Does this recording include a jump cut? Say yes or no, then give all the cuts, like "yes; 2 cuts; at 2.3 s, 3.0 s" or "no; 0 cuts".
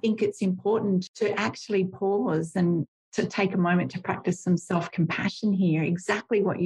yes; 1 cut; at 1.1 s